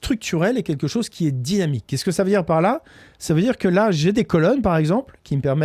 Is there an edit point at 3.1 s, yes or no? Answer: no